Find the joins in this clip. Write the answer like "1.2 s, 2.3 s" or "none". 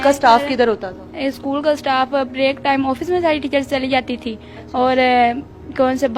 none